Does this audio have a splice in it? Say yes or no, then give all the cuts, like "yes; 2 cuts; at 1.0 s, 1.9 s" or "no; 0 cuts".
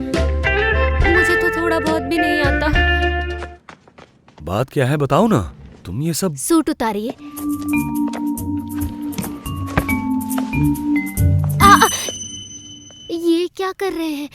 yes; 2 cuts; at 3.3 s, 7.4 s